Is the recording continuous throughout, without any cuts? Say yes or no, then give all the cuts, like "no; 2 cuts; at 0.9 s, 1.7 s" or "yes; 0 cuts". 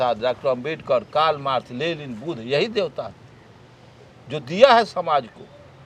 yes; 0 cuts